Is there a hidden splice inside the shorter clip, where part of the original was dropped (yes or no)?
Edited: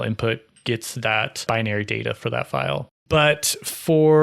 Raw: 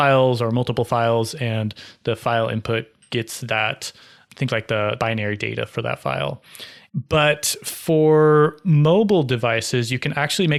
yes